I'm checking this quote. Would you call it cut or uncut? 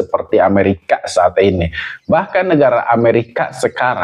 uncut